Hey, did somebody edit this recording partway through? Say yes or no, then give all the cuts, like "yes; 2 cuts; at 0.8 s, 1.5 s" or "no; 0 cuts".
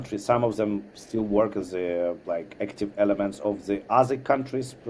no; 0 cuts